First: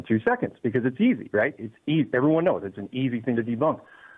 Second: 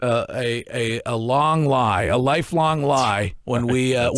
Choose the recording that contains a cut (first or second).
first